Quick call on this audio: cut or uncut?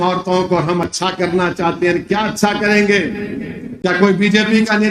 uncut